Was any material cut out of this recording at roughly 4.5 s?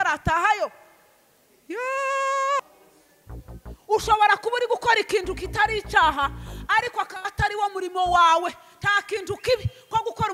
no; 1 cut; at 2.6 s

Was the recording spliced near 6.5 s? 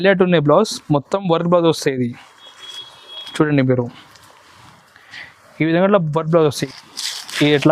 yes; 1 cut; at 6.5 s

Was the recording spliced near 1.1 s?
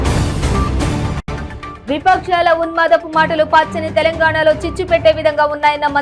yes; 1 cut; at 1.1 s

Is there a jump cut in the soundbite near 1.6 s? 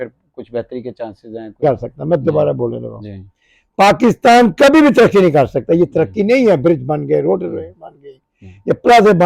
yes; 1 cut; at 1.6 s

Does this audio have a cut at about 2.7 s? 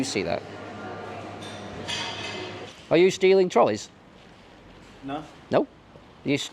yes; 1 cut; at 2.7 s

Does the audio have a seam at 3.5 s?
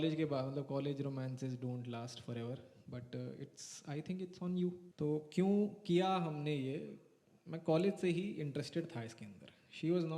no; 1 cut; at 4.8 s

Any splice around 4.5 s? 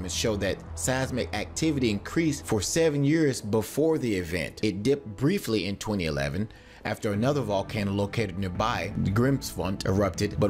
yes; 1 cut; at 4.5 s

